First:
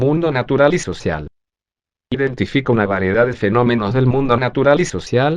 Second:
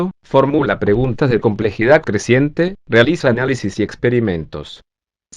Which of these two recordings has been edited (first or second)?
first